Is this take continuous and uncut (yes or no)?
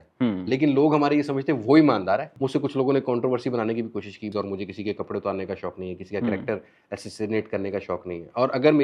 no